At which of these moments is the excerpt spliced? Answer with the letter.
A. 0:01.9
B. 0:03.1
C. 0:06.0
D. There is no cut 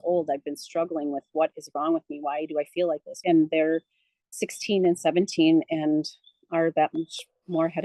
B